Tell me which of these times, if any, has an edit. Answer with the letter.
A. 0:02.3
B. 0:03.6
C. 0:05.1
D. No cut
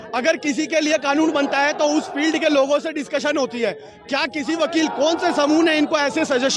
D